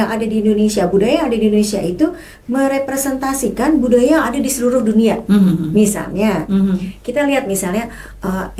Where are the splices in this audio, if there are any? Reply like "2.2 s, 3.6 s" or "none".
none

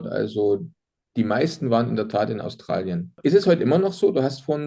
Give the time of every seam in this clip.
none

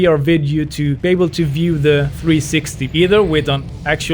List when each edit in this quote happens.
1.0 s, 2.1 s

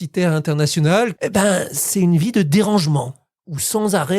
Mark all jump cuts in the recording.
1.1 s

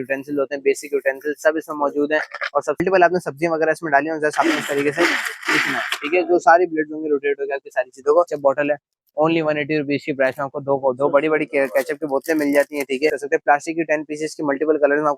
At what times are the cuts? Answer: 2.8 s, 8.3 s, 13.2 s

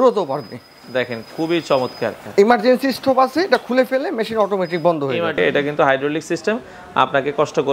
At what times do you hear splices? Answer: 2.2 s, 5.4 s

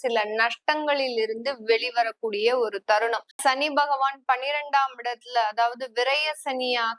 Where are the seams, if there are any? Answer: 3.4 s

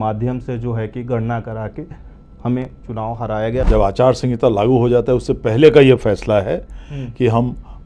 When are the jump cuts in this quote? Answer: 3.7 s

